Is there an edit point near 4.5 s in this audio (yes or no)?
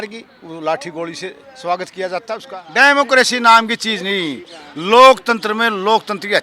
no